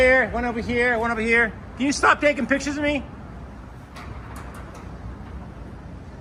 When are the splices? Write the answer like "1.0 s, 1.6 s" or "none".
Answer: none

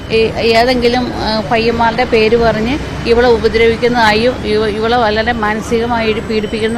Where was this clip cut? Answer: 3.7 s

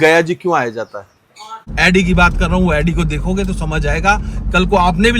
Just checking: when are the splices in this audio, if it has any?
1.6 s

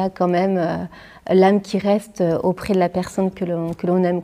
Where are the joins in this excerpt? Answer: none

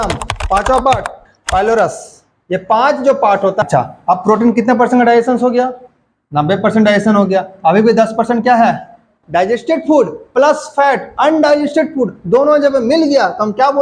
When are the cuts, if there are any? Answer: 3.6 s, 9.2 s

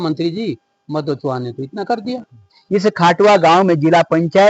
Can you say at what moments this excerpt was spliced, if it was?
2.6 s

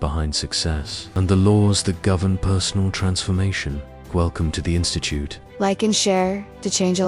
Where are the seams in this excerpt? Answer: 5.4 s

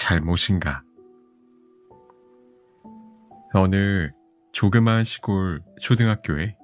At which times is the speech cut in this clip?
0.9 s, 3.5 s

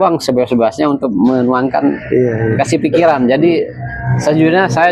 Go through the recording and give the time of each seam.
none

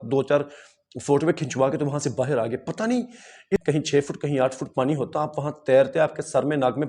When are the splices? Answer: 3.6 s

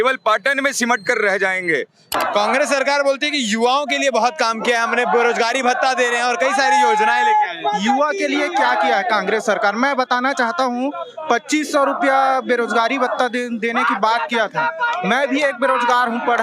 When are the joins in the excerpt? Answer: 2.1 s

